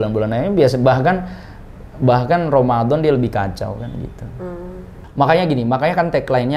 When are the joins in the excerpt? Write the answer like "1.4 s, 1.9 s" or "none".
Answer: 5.0 s